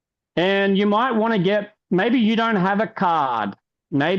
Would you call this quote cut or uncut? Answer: cut